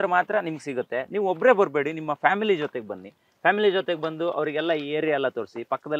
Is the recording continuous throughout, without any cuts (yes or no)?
yes